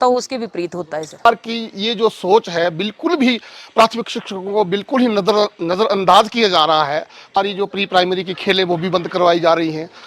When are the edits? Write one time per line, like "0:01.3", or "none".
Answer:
0:01.3
0:07.3